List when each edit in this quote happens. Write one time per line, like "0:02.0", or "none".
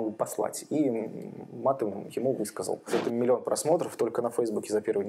0:02.9